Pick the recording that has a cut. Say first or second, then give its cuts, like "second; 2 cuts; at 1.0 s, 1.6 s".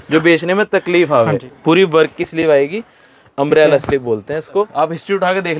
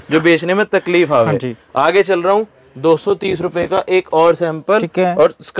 first; 2 cuts; at 1.5 s, 4.7 s